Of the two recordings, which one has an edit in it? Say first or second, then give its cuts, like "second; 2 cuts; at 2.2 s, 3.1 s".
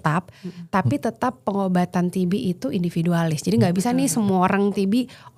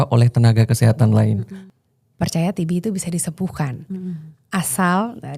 second; 1 cut; at 1.6 s